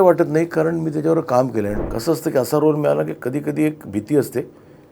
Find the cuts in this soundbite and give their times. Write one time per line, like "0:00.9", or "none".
0:01.8